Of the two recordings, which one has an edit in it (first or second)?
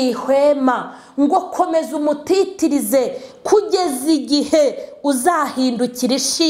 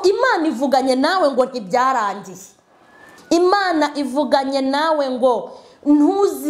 second